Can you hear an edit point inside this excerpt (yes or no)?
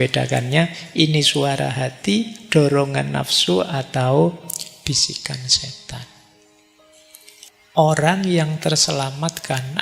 yes